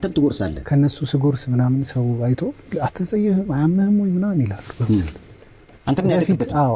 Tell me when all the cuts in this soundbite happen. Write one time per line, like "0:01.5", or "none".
none